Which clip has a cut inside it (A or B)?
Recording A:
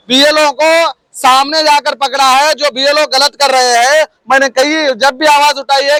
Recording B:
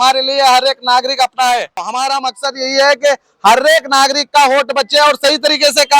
B